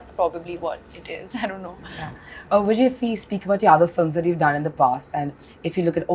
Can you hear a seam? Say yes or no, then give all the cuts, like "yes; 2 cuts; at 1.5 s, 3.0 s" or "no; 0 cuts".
no; 0 cuts